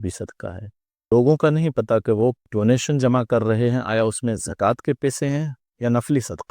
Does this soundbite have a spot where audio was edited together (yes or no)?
yes